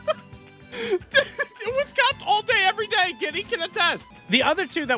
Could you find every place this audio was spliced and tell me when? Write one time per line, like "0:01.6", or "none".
0:04.1